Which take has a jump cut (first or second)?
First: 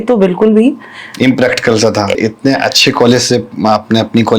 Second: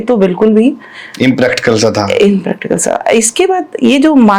first